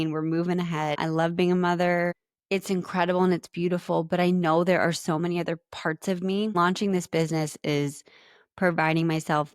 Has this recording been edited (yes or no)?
yes